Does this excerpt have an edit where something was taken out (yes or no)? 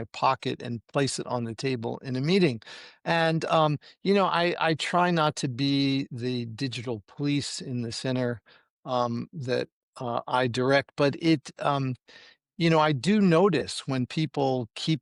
no